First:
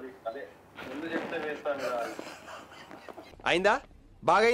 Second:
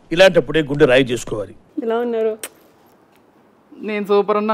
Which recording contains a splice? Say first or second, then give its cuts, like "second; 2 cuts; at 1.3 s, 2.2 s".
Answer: second; 1 cut; at 1.7 s